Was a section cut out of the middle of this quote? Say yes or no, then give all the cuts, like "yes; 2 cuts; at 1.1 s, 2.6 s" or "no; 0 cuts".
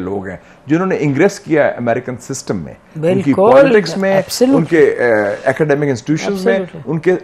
no; 0 cuts